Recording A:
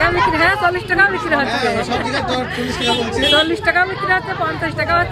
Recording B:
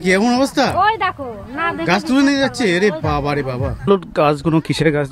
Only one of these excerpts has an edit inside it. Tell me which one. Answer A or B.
B